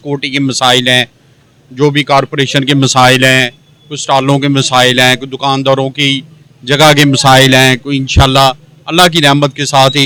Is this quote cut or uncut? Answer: uncut